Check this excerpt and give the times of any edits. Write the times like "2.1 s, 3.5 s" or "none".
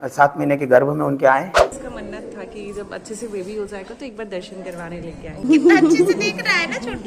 1.6 s, 5.4 s